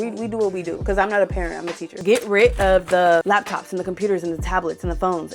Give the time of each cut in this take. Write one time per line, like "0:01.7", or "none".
0:00.8
0:01.9
0:03.2